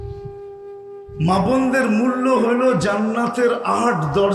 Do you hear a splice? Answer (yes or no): yes